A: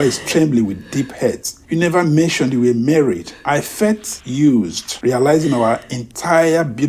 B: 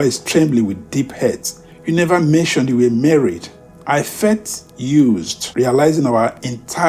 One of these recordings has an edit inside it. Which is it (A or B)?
A